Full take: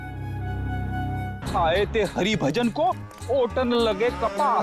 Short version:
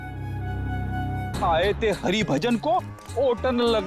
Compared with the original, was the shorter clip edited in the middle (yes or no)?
yes